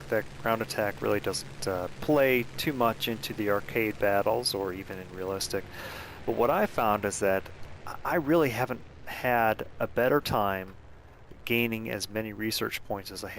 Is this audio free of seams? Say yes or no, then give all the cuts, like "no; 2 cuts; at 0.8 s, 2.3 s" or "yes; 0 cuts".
no; 1 cut; at 10.3 s